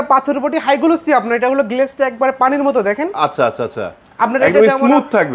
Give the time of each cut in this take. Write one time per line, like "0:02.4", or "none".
none